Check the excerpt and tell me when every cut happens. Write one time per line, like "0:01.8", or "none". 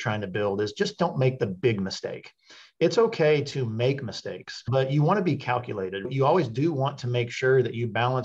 0:06.1